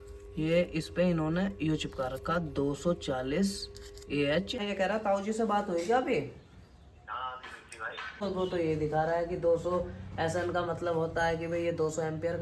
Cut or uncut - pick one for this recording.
cut